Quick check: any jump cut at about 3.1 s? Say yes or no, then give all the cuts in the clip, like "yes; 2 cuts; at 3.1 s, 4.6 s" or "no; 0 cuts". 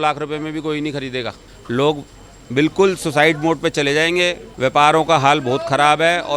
no; 2 cuts; at 1.5 s, 4.5 s